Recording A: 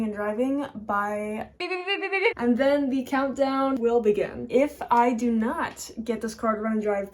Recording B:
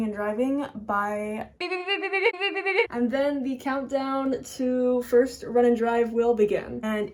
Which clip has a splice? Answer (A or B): A